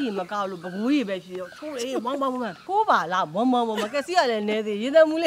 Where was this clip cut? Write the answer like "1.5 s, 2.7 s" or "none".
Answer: 2.6 s